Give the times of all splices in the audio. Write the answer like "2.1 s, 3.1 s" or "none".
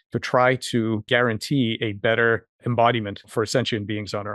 1.0 s, 2.6 s, 3.3 s